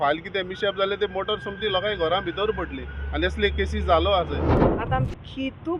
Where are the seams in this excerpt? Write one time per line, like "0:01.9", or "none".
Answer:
0:04.6